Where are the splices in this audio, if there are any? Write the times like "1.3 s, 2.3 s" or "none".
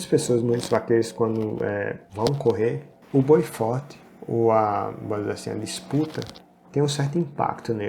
2.0 s, 2.9 s